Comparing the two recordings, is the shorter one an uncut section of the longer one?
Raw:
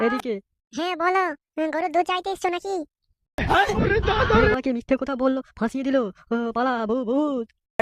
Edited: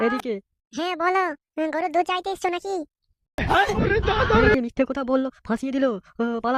no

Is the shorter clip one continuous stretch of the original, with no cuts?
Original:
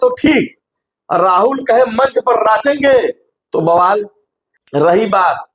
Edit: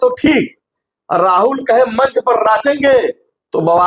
yes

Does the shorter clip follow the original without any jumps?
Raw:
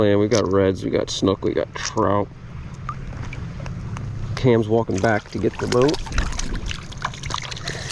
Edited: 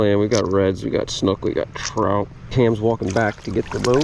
no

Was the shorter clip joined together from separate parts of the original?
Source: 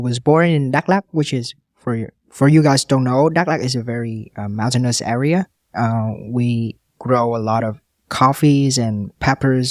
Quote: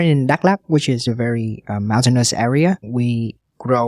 yes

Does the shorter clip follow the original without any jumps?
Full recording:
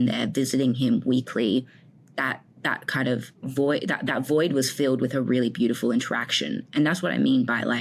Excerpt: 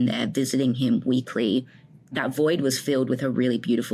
no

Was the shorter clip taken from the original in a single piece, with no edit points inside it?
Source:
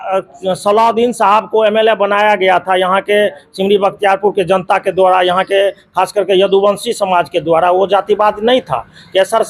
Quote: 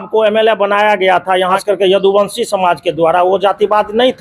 no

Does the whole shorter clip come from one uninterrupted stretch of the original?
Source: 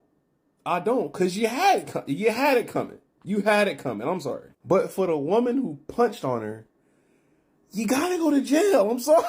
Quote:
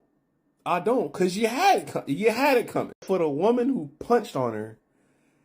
no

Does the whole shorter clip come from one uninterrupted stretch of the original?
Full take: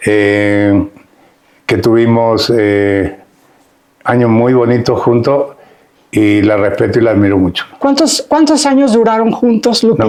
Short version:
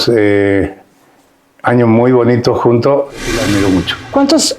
no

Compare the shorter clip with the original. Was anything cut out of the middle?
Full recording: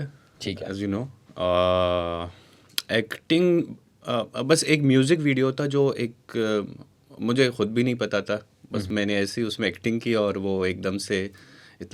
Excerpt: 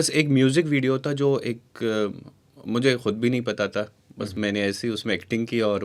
no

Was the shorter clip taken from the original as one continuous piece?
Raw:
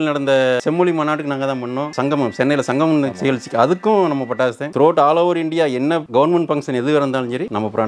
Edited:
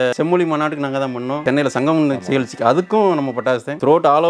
no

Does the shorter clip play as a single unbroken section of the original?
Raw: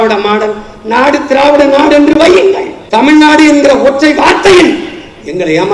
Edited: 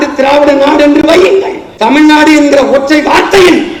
yes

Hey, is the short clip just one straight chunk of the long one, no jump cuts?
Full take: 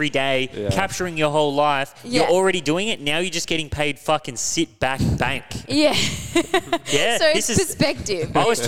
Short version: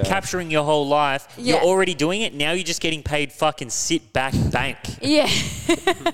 yes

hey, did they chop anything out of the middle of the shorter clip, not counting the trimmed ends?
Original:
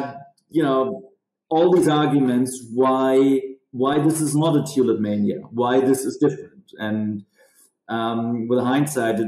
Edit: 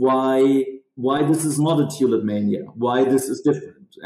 no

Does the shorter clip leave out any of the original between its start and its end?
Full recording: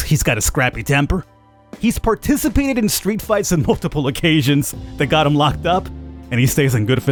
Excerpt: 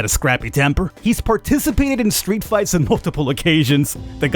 yes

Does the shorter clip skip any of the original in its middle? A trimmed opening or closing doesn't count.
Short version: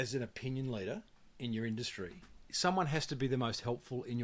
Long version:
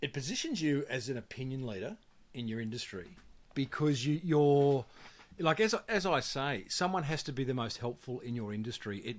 yes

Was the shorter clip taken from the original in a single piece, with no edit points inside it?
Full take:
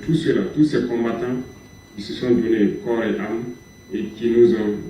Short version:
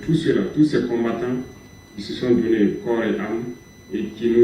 yes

